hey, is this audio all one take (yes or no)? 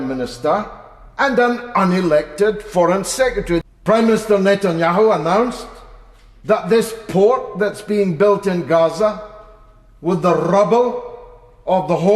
no